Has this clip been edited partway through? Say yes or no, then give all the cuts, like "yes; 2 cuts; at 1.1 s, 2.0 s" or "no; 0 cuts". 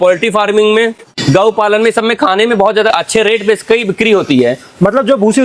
yes; 2 cuts; at 1.1 s, 2.9 s